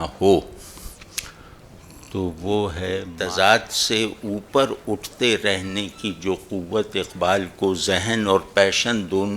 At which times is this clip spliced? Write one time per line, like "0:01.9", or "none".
0:03.0